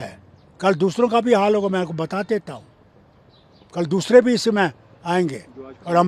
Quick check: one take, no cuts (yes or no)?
yes